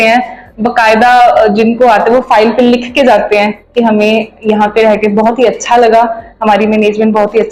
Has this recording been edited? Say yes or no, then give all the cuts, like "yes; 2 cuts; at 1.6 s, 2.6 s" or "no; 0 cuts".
no; 0 cuts